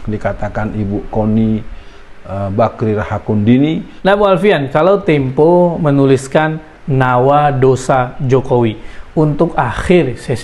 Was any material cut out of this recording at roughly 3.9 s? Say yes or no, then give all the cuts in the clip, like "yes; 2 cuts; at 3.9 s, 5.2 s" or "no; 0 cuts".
yes; 1 cut; at 3.9 s